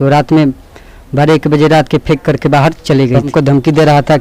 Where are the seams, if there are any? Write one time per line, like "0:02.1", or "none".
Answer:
0:03.3